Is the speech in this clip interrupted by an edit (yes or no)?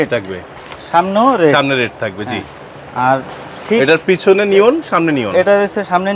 no